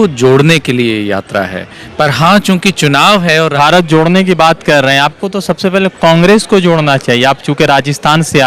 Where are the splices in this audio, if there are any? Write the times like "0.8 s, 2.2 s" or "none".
3.5 s